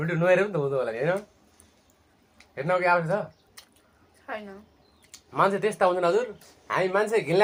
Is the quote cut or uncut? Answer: uncut